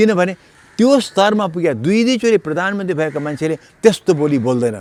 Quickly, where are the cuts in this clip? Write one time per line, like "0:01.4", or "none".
none